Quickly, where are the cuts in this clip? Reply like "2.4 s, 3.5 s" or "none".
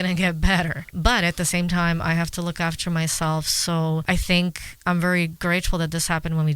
0.9 s, 4.0 s